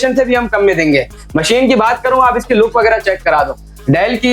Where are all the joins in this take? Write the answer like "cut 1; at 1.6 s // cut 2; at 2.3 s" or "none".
none